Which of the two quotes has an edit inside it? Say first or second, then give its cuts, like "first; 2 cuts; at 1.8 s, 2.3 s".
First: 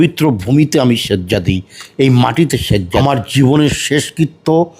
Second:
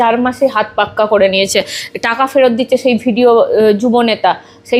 first; 1 cut; at 3.0 s